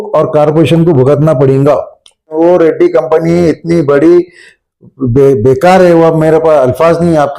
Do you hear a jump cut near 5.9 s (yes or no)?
no